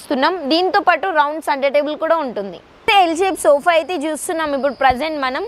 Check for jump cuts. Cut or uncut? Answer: cut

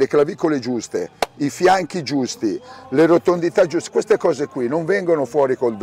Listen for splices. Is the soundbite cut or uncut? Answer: uncut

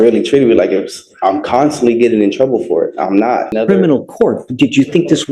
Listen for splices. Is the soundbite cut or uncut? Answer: cut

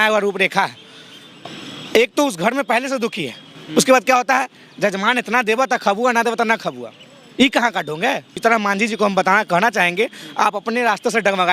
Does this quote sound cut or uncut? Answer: cut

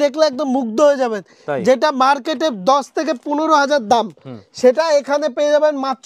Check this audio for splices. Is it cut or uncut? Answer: uncut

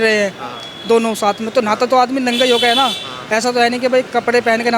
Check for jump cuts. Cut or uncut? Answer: uncut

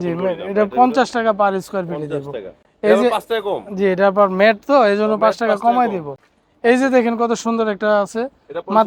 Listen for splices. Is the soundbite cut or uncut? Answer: uncut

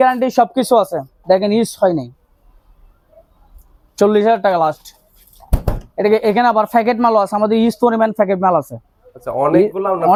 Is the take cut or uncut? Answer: uncut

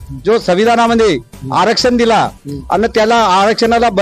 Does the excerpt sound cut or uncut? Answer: uncut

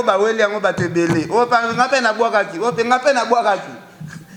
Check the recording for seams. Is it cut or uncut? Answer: uncut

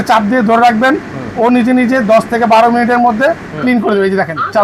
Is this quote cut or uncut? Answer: uncut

